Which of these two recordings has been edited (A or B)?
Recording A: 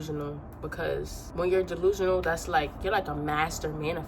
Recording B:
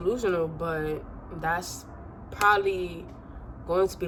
A